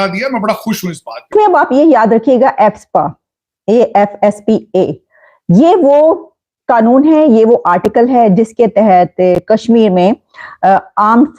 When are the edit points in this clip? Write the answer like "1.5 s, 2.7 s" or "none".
1.3 s